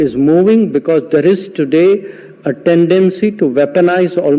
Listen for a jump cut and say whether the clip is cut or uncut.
uncut